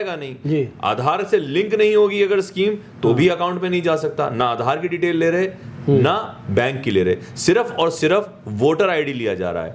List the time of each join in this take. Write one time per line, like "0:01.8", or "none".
none